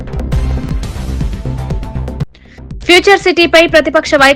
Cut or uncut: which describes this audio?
uncut